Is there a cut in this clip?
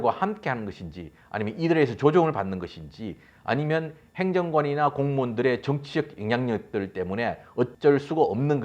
yes; 1 cut; at 7.7 s

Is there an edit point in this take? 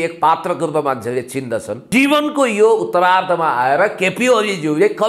yes; 1 cut; at 1.8 s

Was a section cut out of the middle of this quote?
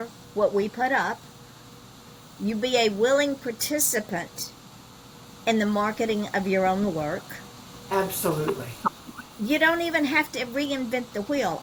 no; 0 cuts

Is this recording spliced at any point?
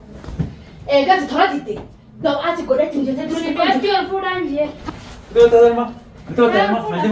yes; 1 cut; at 4.8 s

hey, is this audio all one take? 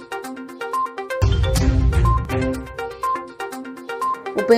yes; 0 cuts

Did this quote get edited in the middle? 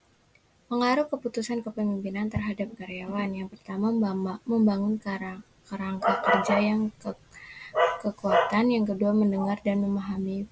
no; 0 cuts

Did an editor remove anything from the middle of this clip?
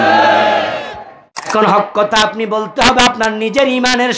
yes; 1 cut; at 1.5 s

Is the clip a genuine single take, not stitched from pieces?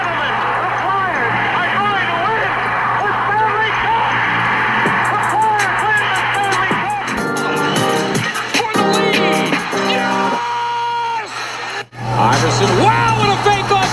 no; 2 cuts; at 8.1 s, 12.4 s

